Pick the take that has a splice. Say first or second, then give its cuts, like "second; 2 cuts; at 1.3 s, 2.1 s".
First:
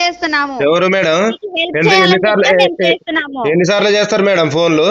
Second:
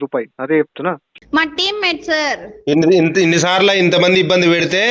second; 1 cut; at 1.1 s